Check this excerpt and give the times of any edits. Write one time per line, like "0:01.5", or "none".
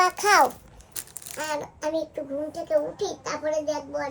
none